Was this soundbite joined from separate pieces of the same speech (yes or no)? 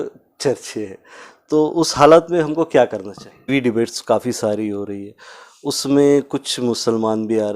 yes